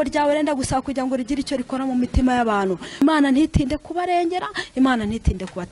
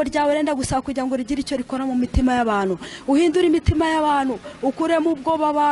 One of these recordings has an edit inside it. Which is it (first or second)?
first